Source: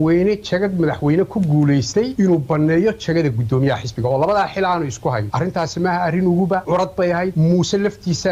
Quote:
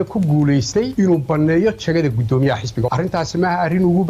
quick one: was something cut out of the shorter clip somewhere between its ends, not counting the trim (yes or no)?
yes